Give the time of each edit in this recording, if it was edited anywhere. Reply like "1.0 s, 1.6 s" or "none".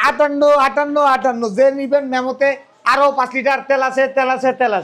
none